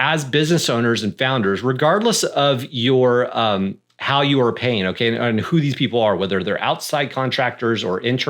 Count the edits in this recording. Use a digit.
0